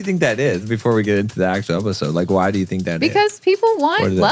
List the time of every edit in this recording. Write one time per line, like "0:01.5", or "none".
none